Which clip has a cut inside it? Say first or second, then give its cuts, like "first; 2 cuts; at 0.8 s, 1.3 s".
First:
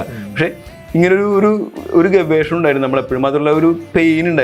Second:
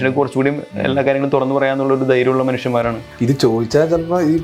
second; 1 cut; at 3.0 s